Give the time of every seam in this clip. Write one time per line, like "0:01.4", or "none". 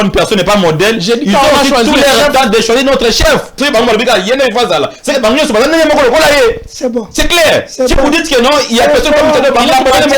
0:03.6